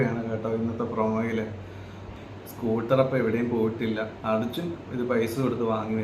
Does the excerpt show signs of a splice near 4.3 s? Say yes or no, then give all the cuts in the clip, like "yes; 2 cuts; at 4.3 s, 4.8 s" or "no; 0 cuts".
no; 1 cut; at 2.0 s